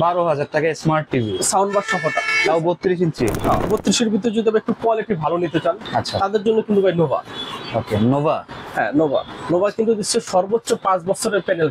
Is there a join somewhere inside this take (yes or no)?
yes